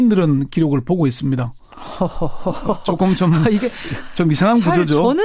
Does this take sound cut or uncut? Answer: uncut